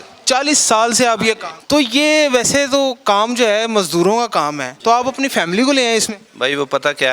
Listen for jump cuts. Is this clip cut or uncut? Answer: cut